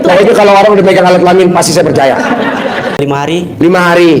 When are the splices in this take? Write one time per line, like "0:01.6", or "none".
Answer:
0:03.0